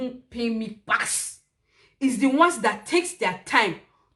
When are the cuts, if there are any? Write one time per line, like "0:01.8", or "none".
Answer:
none